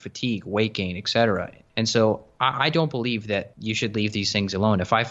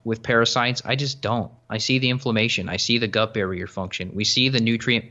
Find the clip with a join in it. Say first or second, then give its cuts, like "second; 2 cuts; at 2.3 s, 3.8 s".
first; 2 cuts; at 1.6 s, 3.5 s